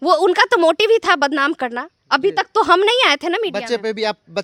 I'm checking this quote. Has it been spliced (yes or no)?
no